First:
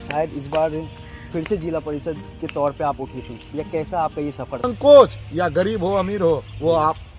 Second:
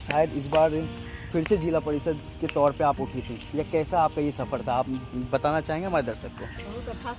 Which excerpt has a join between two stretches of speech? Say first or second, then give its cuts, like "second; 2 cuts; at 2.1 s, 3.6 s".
first; 1 cut; at 4.7 s